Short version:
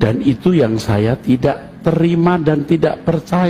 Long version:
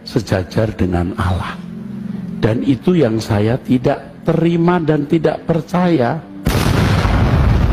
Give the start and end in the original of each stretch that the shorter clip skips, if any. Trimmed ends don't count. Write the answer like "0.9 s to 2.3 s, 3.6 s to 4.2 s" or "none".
none